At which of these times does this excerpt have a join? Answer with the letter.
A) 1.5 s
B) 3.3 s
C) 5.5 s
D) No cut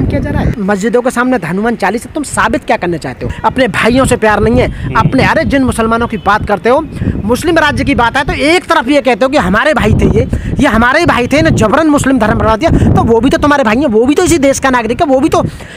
B